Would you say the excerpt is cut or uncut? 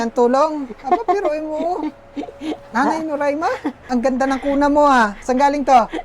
cut